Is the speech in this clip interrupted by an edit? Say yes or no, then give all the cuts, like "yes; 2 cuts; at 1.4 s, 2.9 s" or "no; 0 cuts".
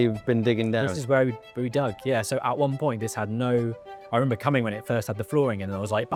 no; 0 cuts